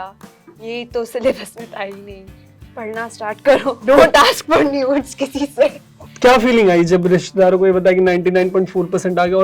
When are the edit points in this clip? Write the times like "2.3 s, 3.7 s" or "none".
2.5 s, 3.8 s, 5.9 s